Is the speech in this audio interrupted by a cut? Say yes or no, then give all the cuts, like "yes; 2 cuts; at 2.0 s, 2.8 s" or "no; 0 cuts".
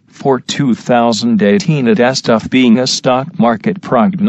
yes; 1 cut; at 1.1 s